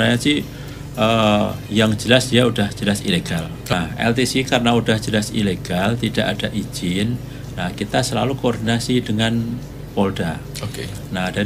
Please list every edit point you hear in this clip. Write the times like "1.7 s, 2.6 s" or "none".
3.7 s